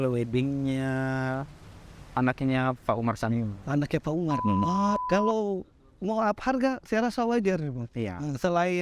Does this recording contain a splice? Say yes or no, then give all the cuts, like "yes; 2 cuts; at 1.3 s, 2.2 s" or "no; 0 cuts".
yes; 1 cut; at 4.8 s